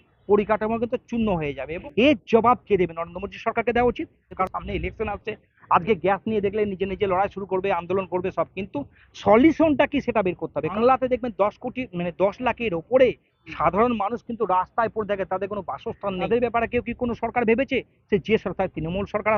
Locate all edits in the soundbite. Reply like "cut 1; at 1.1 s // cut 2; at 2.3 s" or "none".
cut 1; at 1.7 s // cut 2; at 4.4 s // cut 3; at 10.7 s // cut 4; at 16.3 s